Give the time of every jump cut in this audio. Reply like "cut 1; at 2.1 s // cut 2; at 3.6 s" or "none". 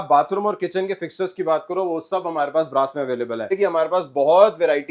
cut 1; at 3.5 s